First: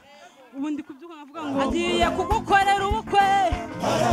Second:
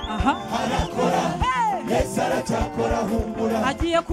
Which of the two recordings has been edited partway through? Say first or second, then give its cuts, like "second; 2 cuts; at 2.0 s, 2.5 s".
first; 1 cut; at 1.7 s